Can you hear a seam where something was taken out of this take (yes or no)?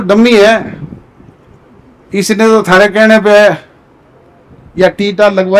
no